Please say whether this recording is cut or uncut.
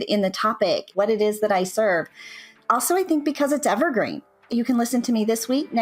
cut